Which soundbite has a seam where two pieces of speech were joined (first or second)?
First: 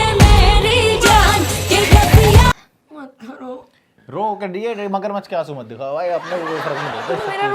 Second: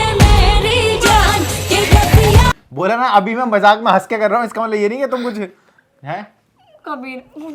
first